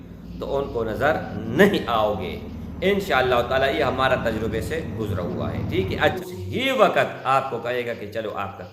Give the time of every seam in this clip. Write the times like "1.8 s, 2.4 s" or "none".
6.2 s